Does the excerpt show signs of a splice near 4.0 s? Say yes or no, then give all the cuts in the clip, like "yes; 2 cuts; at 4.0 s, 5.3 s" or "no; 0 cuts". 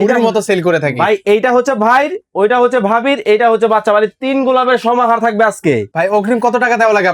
no; 1 cut; at 5.9 s